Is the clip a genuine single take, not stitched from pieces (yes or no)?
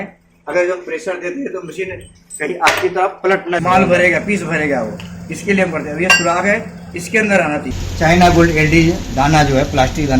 no